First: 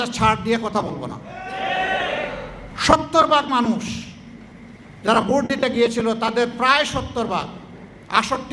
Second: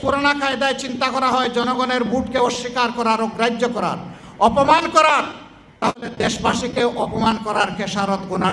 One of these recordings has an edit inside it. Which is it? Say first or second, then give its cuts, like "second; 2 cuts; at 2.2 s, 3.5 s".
first; 1 cut; at 2.7 s